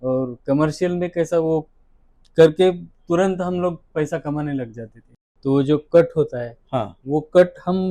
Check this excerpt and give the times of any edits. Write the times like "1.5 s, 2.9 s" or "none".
5.2 s